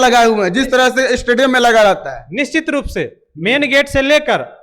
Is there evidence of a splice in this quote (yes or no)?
no